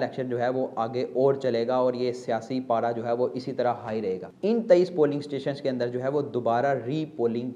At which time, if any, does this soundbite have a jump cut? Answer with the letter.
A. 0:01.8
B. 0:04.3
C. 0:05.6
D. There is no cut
B